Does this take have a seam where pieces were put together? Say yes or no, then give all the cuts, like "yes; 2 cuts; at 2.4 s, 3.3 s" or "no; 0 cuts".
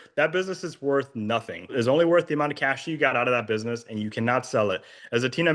yes; 1 cut; at 1.7 s